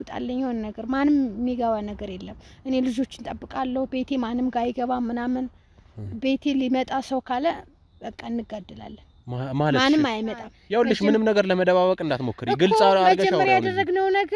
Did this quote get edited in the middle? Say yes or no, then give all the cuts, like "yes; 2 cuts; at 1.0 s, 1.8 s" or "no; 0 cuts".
yes; 1 cut; at 10.5 s